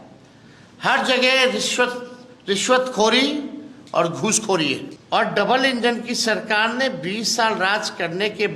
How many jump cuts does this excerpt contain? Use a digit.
1